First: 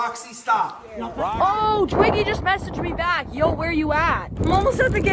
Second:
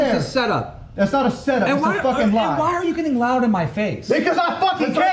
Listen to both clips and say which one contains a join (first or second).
first